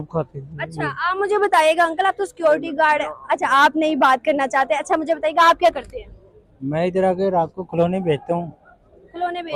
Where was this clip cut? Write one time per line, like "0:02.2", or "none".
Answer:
none